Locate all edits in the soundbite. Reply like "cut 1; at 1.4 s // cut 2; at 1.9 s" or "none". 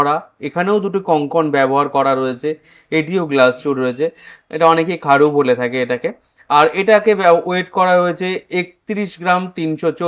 none